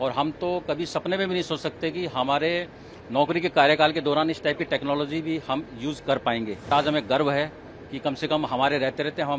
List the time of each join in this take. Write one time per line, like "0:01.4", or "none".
0:06.7